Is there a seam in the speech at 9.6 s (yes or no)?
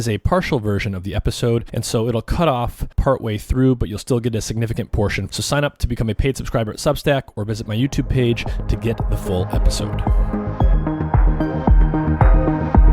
yes